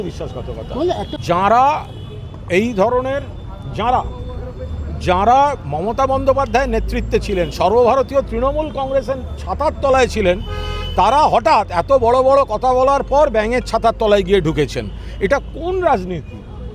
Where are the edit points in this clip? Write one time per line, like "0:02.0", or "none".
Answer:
0:01.1